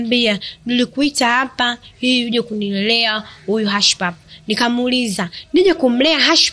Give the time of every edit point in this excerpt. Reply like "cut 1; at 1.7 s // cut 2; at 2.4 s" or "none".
none